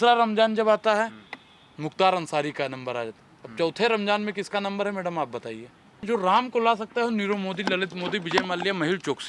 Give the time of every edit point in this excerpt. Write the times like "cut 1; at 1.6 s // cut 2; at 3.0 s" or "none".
cut 1; at 6.0 s